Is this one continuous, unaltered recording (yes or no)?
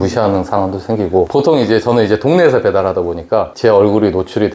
yes